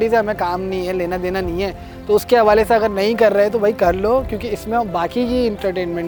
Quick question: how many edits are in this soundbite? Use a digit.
0